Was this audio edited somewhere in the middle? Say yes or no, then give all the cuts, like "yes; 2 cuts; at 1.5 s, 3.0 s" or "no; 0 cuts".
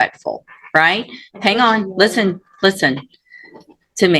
no; 0 cuts